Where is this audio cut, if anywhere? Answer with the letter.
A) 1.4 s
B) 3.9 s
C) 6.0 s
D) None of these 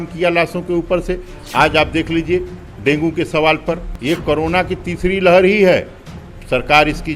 B